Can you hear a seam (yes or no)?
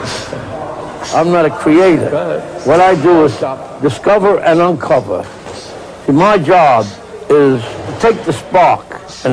yes